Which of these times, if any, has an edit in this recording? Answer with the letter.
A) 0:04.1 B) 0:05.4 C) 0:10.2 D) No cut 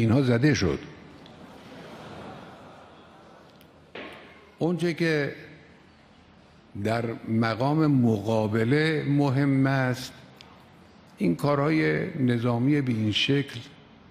A